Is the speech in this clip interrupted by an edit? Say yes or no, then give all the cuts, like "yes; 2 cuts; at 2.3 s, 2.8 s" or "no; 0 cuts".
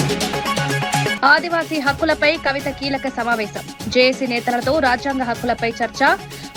no; 0 cuts